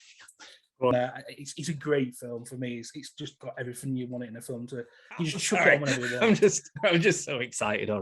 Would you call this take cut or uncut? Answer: cut